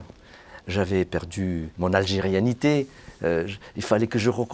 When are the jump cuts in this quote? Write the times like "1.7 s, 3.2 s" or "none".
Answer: 1.7 s